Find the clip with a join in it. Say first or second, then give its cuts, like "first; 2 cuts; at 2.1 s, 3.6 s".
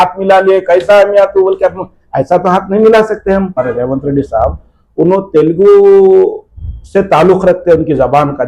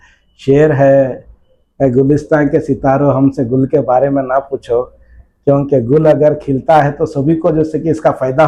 first; 1 cut; at 3.6 s